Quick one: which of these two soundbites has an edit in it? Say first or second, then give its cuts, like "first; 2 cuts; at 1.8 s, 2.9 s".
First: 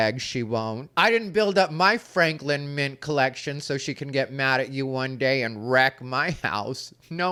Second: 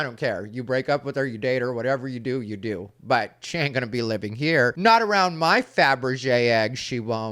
second; 1 cut; at 4.8 s